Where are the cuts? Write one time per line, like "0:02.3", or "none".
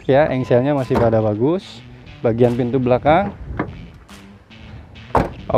none